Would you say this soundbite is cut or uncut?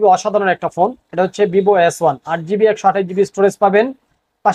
uncut